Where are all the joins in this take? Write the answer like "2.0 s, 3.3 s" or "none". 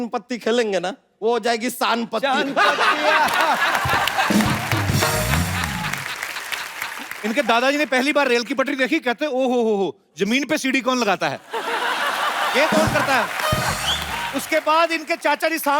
1.1 s, 7.1 s, 14.3 s